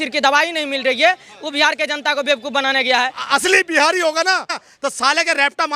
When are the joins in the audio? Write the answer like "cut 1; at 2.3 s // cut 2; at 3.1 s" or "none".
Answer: cut 1; at 3.2 s // cut 2; at 4.6 s